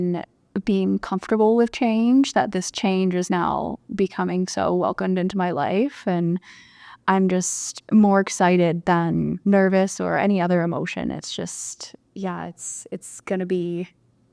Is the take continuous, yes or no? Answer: yes